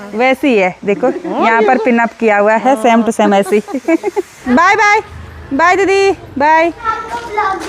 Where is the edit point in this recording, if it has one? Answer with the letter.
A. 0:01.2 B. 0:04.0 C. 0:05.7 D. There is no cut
D